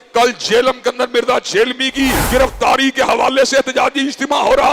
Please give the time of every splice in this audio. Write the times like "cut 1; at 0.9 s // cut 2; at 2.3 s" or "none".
cut 1; at 2.2 s